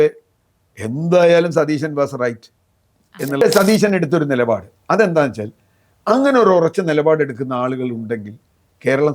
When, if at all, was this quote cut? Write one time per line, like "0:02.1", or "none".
0:03.4